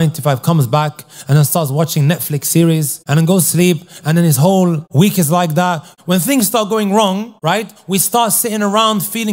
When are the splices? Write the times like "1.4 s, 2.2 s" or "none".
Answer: 3.0 s, 4.8 s, 5.9 s, 7.3 s